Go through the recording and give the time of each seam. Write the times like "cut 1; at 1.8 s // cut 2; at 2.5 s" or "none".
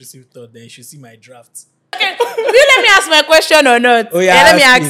cut 1; at 2.0 s

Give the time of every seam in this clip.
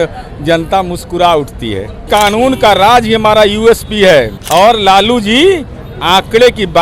cut 1; at 2.1 s // cut 2; at 4.4 s

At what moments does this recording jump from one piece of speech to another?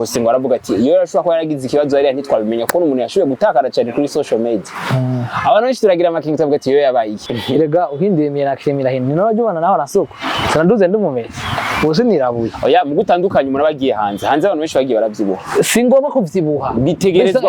cut 1; at 7.2 s

